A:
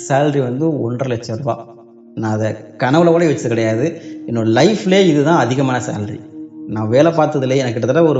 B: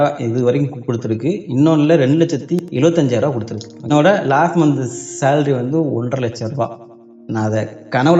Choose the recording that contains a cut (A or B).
B